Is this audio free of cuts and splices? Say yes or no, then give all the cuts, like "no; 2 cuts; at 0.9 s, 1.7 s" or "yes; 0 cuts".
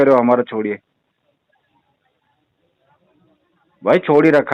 yes; 0 cuts